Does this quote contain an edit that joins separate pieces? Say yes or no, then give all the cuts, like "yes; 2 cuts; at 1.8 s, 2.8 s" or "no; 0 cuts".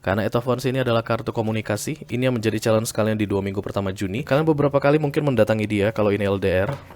yes; 1 cut; at 4.1 s